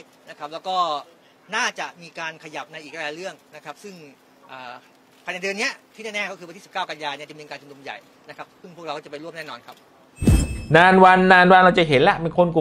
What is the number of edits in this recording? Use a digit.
1